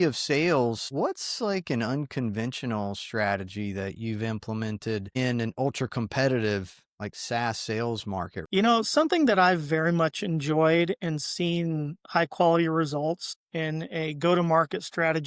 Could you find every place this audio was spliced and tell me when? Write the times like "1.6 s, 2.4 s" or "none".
8.4 s